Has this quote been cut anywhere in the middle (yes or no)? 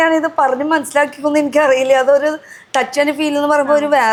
no